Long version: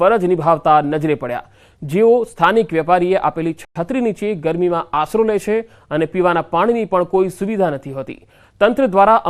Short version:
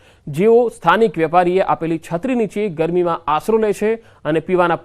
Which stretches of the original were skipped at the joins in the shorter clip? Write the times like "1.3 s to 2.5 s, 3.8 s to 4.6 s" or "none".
3.6 s to 3.7 s